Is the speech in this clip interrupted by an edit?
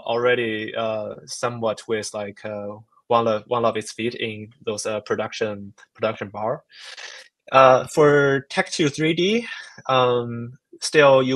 no; 0 cuts

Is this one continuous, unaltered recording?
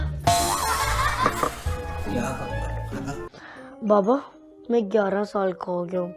no; 1 cut; at 3.3 s

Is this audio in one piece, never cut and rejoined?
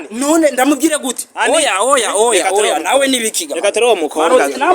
yes; 0 cuts

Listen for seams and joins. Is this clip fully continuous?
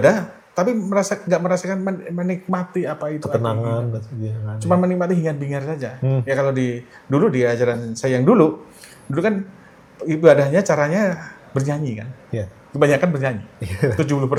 yes; 0 cuts

